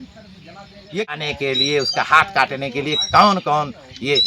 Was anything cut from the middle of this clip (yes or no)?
yes